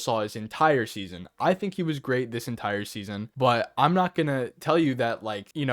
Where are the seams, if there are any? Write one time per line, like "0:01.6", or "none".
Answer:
0:03.3